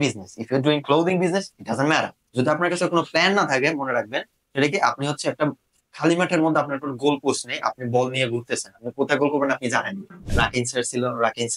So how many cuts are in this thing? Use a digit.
2